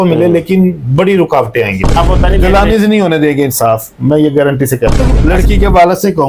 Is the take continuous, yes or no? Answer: no